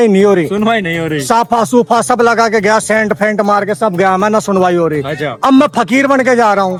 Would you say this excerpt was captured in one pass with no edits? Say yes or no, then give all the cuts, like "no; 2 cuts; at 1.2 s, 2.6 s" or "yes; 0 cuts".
yes; 0 cuts